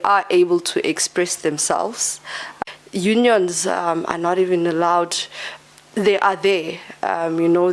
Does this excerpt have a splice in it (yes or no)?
yes